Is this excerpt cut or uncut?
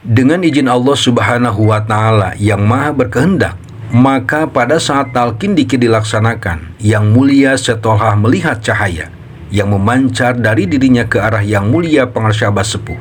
uncut